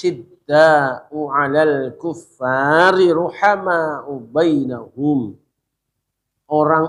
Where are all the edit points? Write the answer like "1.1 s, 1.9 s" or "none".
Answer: none